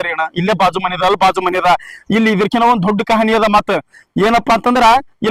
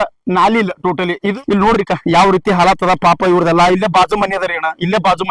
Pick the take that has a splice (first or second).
second